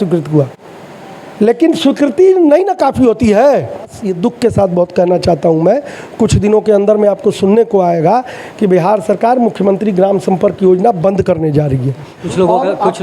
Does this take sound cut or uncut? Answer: cut